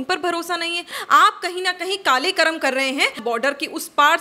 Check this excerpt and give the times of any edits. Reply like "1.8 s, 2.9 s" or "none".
1.0 s, 3.2 s